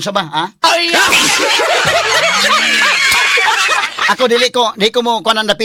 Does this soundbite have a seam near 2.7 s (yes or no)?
no